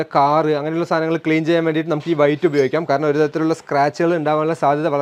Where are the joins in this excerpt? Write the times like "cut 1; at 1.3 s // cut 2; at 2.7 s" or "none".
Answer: none